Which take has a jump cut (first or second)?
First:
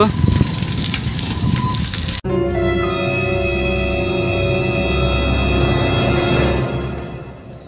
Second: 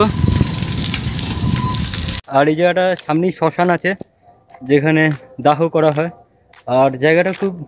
second